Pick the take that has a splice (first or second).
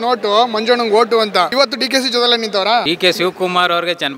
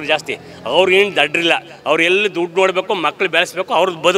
first